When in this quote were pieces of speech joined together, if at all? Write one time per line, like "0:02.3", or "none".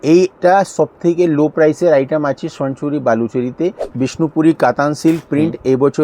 0:03.9